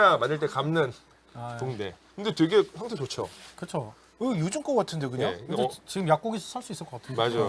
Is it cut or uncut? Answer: uncut